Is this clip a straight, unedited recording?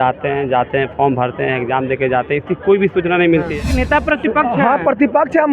no; 1 cut; at 3.7 s

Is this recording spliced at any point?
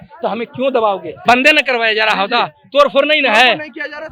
yes; 1 cut; at 1.1 s

